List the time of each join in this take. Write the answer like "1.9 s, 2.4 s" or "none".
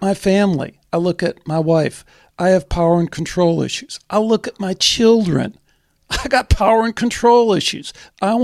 none